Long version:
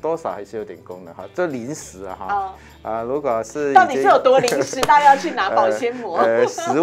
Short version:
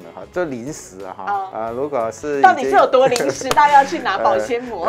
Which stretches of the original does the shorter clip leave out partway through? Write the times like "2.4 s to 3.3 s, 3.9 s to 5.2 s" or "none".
2.5 s to 2.8 s